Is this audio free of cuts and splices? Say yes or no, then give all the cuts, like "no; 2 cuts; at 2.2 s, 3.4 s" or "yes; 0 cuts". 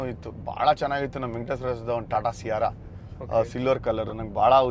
yes; 0 cuts